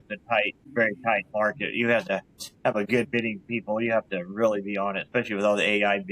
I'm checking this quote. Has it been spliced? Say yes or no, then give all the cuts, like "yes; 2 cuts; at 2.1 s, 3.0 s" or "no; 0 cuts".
no; 0 cuts